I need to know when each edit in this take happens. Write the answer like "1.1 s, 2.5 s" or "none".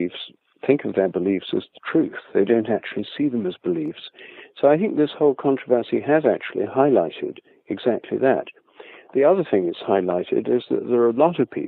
none